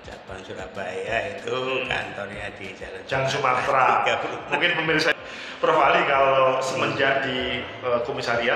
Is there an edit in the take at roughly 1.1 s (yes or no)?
no